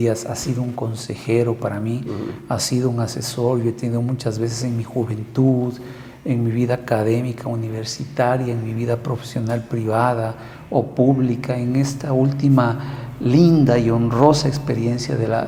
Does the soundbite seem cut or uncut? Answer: uncut